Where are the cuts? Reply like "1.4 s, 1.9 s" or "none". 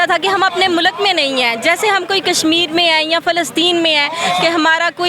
none

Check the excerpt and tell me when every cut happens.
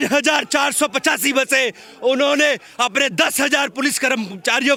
none

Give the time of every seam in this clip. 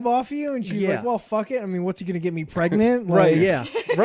none

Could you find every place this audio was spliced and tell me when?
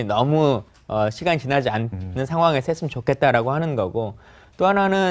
3.6 s

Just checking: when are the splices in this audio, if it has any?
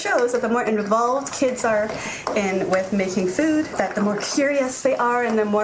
none

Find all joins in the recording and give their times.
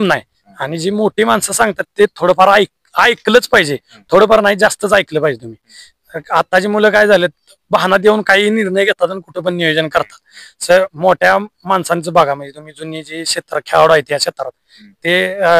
none

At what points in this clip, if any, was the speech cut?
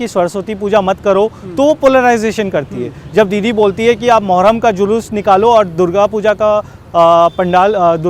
none

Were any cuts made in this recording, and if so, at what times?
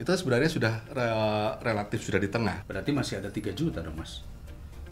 2.6 s

